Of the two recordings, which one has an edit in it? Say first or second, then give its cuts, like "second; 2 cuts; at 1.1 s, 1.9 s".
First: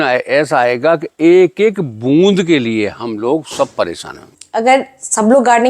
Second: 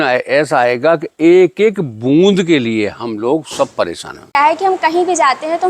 second; 1 cut; at 4.4 s